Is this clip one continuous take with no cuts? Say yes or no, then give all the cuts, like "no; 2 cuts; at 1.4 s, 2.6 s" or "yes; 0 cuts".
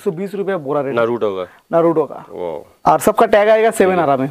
no; 2 cuts; at 0.9 s, 2.7 s